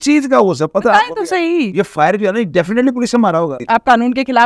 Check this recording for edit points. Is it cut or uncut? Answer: cut